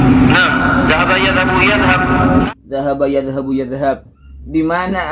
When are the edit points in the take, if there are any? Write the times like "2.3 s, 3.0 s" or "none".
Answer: 2.2 s